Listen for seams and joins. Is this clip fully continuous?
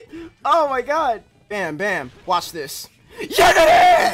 no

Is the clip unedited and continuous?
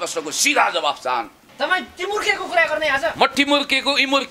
no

